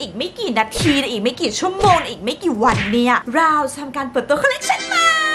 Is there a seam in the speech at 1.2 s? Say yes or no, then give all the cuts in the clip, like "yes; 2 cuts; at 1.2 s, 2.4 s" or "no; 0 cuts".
no; 0 cuts